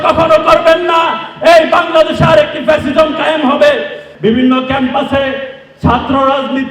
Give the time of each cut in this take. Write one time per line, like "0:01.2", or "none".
0:04.0